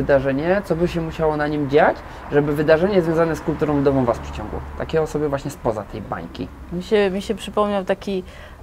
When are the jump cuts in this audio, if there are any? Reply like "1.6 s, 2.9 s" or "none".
none